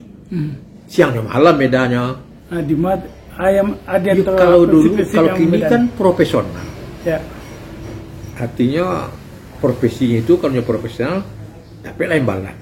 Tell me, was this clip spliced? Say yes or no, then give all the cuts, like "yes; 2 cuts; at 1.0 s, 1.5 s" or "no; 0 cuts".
no; 0 cuts